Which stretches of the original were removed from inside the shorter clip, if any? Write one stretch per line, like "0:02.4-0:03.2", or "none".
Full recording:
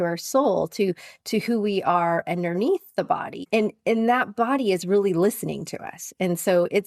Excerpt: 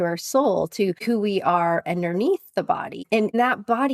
0:01.0-0:01.4
0:03.5-0:03.7